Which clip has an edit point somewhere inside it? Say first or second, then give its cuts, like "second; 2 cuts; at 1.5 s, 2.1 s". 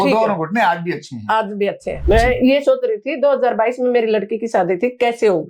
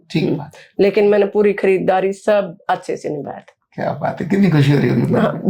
first; 1 cut; at 2.0 s